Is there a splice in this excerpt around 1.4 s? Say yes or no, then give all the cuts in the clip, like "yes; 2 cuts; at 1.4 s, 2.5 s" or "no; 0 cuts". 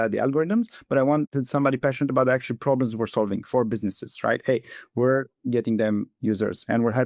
yes; 1 cut; at 1.4 s